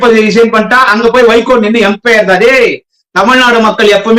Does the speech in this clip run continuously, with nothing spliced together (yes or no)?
yes